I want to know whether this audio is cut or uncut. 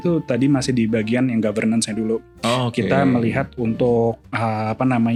uncut